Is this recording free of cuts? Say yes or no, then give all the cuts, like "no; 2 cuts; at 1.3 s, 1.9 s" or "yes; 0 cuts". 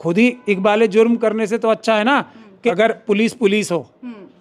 no; 1 cut; at 2.7 s